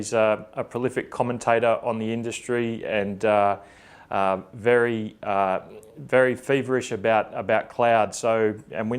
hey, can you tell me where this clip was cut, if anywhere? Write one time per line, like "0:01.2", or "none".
0:02.4